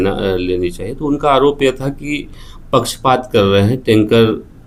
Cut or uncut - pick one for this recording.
uncut